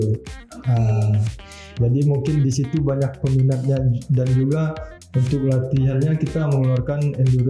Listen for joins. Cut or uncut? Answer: uncut